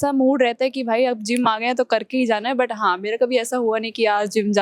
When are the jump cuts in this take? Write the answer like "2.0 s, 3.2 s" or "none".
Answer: none